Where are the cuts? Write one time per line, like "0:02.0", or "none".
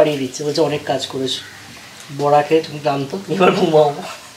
none